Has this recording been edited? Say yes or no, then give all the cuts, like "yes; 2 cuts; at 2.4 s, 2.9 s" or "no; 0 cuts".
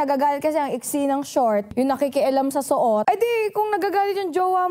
yes; 2 cuts; at 1.7 s, 3.0 s